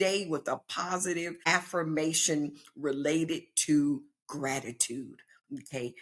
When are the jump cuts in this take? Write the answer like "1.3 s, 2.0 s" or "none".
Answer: 1.4 s